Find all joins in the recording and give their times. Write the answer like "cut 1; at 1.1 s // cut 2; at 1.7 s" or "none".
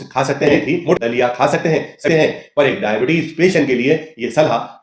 cut 1; at 1.0 s // cut 2; at 2.1 s